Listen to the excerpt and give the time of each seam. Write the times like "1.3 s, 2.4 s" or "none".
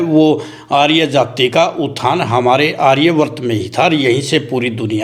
none